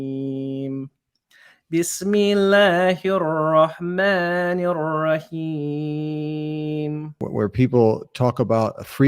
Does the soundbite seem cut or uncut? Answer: cut